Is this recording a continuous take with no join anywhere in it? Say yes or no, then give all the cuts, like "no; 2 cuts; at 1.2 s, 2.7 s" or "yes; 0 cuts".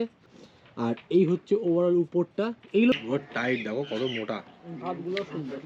no; 1 cut; at 2.9 s